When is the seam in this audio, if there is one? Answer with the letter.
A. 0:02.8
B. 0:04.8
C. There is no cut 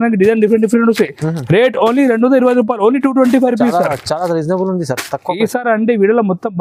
C